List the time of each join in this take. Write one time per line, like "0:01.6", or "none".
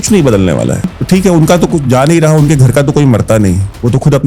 0:01.0